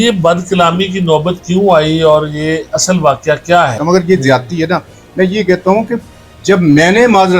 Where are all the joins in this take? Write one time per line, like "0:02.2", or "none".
0:03.7